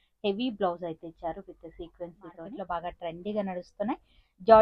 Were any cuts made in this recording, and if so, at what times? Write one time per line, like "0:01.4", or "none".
0:02.5